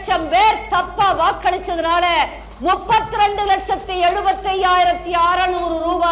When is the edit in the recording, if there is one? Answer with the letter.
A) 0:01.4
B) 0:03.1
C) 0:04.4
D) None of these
D